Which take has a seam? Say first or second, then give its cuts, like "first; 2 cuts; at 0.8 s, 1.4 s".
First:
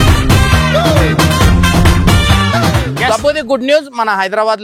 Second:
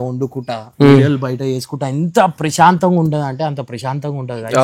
first; 1 cut; at 2.9 s